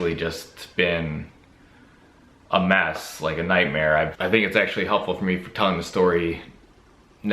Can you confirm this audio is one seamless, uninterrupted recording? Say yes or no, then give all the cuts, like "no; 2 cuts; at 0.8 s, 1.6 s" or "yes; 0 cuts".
no; 1 cut; at 4.1 s